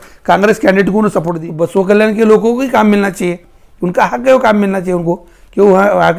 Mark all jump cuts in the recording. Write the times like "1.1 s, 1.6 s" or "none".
1.4 s